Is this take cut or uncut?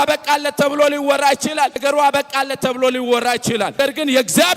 cut